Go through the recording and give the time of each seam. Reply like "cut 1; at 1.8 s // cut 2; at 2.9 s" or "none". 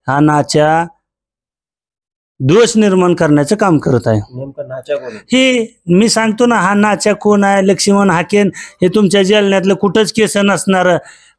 none